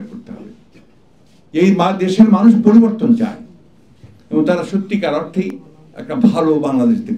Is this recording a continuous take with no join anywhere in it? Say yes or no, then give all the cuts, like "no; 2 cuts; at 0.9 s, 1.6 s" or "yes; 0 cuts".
yes; 0 cuts